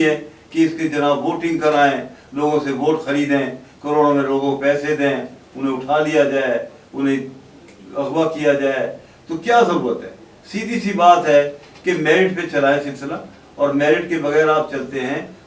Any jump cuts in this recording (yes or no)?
no